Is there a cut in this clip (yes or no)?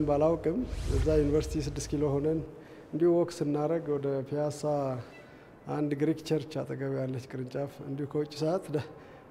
no